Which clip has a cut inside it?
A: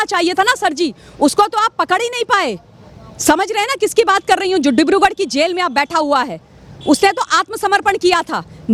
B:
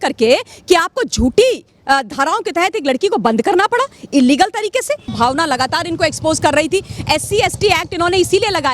B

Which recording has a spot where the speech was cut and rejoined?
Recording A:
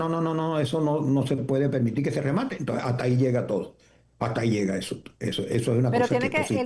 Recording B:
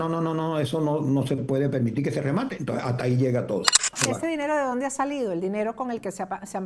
B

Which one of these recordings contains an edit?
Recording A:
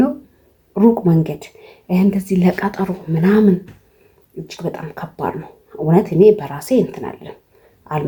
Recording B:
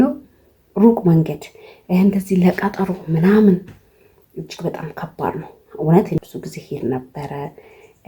B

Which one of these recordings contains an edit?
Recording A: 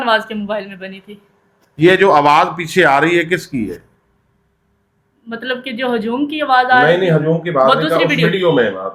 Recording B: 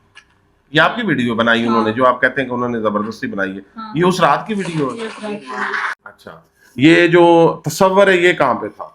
B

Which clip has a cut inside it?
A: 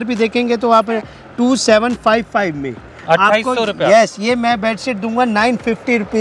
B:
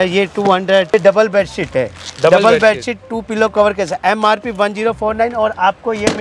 B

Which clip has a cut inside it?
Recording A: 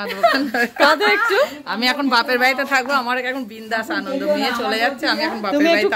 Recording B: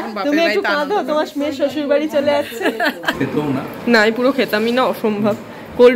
B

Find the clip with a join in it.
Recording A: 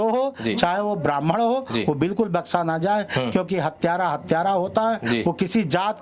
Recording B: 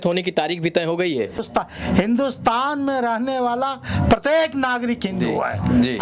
B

